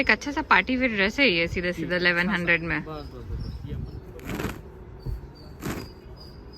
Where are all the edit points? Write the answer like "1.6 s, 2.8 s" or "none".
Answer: 3.8 s